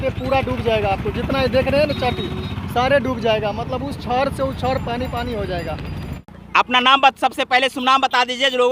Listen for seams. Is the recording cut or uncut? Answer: uncut